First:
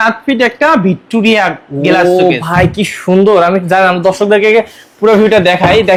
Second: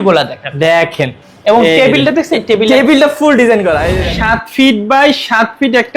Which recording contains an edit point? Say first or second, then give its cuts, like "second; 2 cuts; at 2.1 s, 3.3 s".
second; 1 cut; at 4.0 s